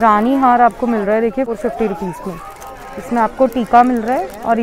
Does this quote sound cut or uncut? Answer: cut